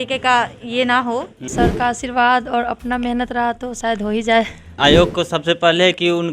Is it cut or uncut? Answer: cut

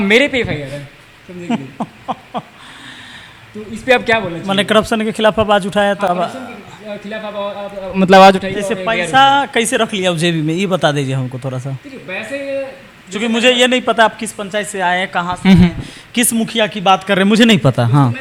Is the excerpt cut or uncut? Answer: uncut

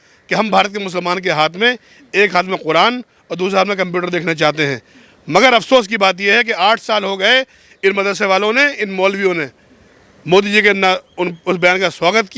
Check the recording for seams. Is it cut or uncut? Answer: uncut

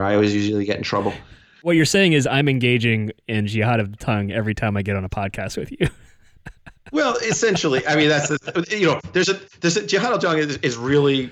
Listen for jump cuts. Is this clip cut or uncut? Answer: cut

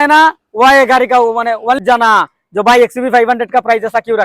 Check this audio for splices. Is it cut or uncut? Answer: cut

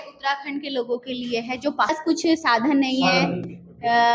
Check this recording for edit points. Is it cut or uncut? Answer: cut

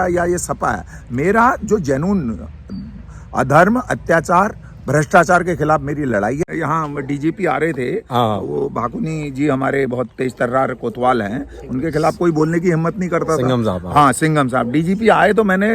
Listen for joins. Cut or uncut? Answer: cut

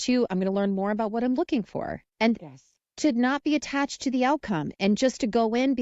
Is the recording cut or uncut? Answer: cut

